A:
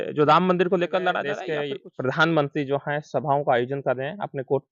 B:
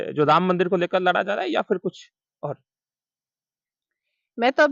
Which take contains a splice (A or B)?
A